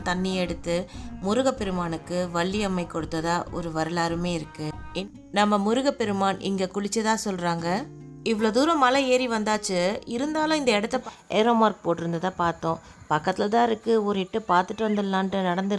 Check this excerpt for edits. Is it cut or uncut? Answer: cut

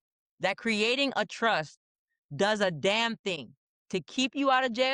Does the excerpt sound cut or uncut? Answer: uncut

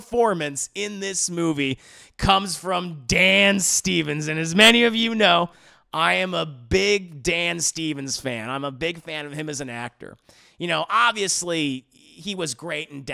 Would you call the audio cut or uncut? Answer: uncut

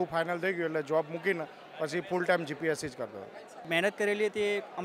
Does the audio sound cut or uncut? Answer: cut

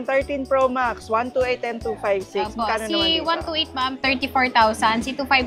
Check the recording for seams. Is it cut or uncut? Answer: uncut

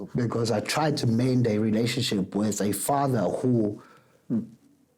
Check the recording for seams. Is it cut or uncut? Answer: uncut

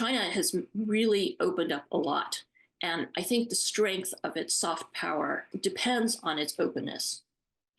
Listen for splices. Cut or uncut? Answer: cut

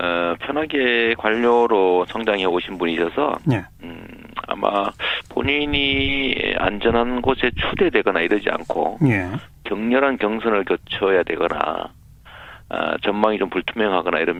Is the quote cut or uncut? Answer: uncut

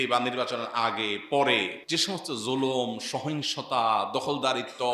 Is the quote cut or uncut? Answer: cut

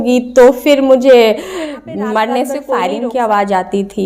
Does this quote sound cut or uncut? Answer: cut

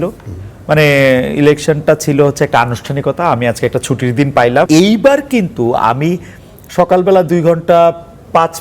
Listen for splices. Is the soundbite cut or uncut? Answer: cut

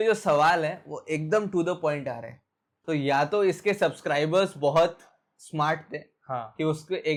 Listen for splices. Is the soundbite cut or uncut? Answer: uncut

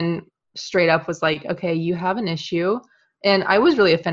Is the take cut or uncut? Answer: uncut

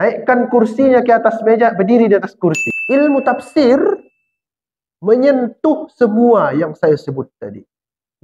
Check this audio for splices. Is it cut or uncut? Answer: cut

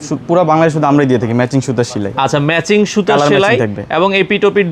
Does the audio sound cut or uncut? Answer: uncut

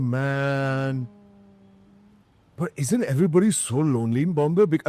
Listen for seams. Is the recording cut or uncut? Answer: uncut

